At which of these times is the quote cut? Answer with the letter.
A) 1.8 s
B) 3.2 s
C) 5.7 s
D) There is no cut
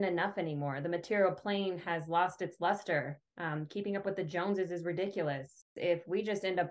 C